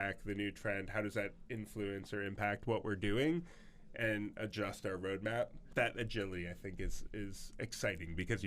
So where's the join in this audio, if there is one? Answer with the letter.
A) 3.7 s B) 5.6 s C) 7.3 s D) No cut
B